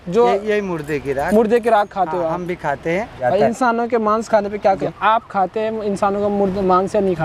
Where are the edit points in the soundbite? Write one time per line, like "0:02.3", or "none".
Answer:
0:03.2
0:04.8